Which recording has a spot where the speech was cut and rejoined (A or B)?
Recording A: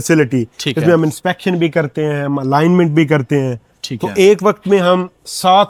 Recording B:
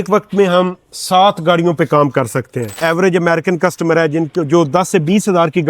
B